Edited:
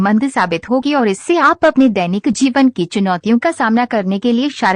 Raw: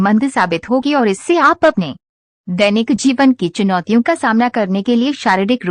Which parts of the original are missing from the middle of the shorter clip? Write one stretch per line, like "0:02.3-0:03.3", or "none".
0:02.2-0:02.9